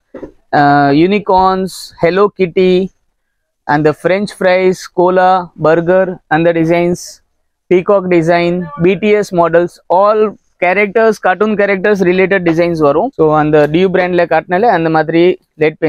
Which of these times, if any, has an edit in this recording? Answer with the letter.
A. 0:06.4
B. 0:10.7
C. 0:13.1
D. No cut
C